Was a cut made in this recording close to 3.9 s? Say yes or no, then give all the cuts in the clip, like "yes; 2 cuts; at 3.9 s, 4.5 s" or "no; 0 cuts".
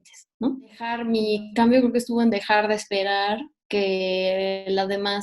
no; 1 cut; at 1.0 s